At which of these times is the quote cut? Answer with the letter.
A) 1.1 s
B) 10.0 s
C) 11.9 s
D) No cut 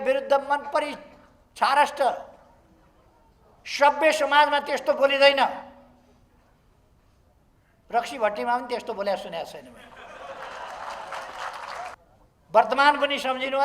C